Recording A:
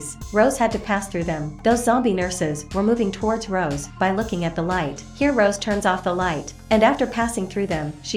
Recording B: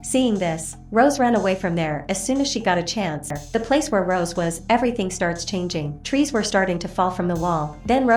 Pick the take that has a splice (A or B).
B